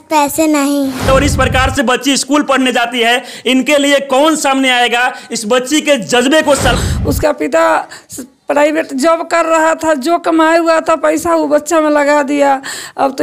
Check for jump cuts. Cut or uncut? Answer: cut